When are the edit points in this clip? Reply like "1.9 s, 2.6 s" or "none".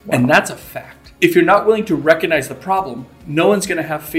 1.0 s